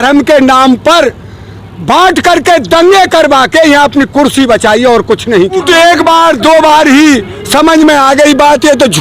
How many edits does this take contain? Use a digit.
1